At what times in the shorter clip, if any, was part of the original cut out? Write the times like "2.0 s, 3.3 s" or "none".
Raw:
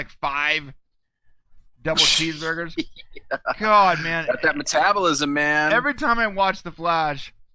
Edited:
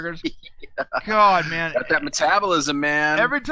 none